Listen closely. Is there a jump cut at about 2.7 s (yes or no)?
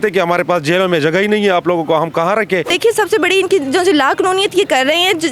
yes